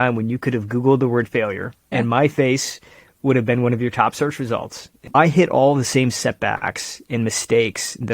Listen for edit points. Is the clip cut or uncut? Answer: cut